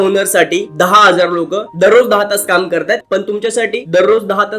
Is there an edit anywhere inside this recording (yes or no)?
yes